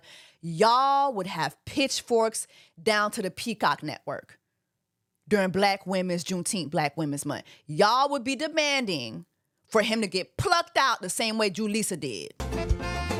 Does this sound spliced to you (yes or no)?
no